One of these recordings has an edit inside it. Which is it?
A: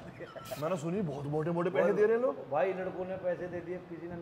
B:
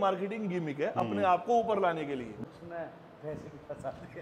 B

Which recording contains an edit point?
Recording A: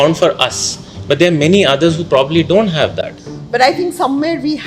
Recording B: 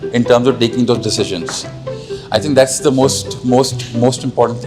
A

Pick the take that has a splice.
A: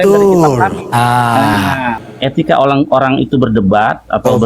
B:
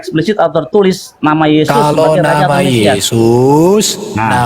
A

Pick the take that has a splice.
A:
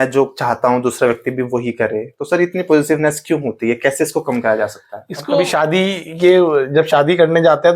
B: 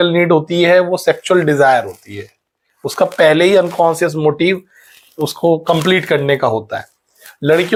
A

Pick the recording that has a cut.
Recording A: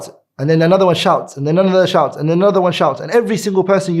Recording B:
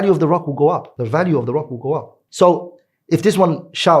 B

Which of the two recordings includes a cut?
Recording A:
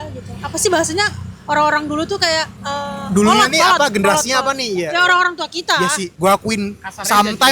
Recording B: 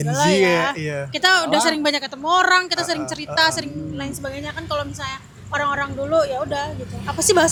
A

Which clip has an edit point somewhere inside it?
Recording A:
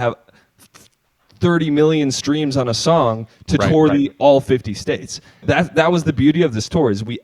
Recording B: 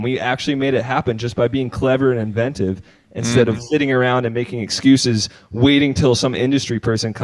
A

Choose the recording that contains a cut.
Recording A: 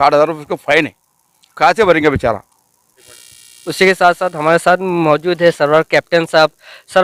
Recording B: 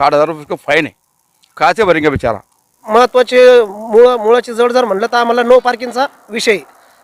B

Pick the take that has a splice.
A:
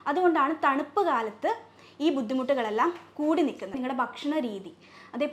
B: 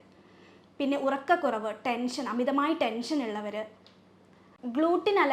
A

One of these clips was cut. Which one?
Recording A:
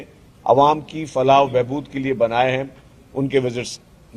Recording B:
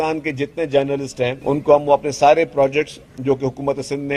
B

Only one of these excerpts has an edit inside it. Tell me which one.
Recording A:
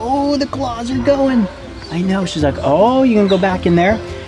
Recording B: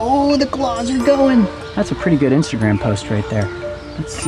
B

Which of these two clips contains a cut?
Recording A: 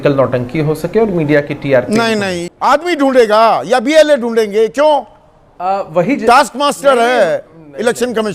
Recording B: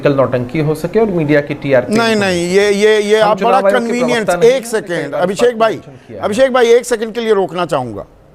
A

